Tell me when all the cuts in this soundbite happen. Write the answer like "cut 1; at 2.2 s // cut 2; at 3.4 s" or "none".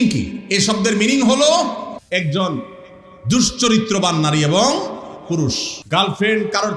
cut 1; at 1.9 s // cut 2; at 5.7 s